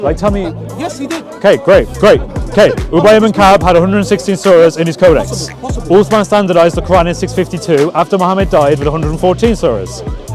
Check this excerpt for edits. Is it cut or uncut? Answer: uncut